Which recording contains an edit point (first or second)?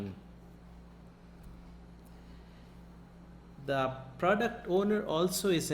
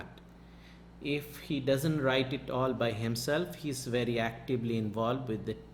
first